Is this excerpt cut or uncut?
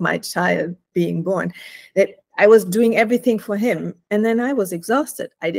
uncut